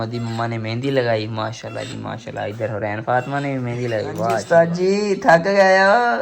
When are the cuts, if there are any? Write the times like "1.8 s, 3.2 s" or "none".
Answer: 4.4 s